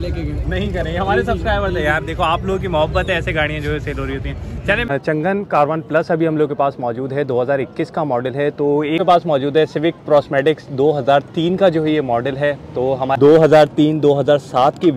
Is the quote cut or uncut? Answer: cut